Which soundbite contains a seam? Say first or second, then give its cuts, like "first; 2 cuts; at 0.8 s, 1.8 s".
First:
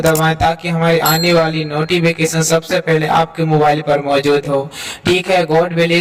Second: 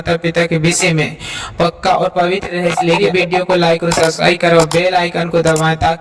second; 1 cut; at 3.0 s